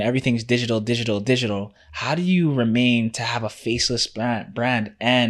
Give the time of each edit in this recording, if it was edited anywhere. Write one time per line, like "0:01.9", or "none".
none